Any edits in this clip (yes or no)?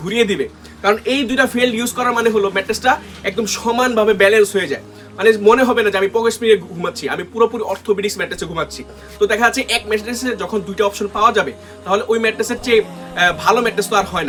no